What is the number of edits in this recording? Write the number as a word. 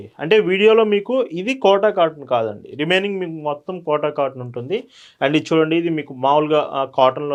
zero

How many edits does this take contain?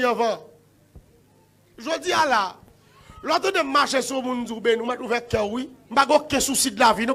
zero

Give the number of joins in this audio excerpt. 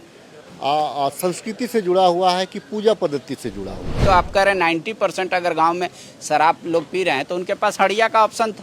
one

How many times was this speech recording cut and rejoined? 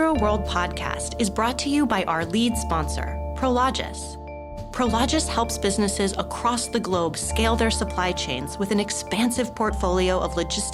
zero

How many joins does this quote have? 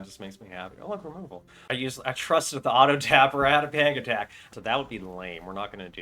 two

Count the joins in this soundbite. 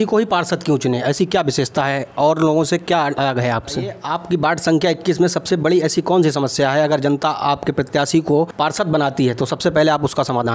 two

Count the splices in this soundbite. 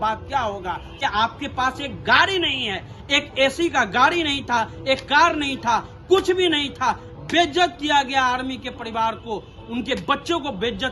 one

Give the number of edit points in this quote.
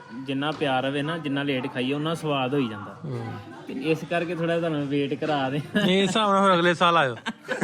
zero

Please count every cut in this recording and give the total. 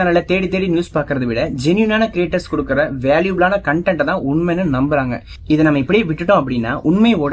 zero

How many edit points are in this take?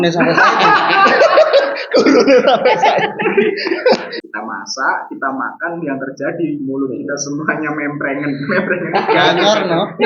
one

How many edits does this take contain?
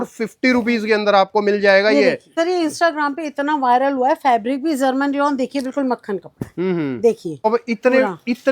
two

